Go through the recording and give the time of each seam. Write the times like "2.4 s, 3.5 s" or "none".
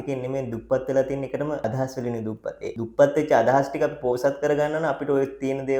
1.6 s, 2.7 s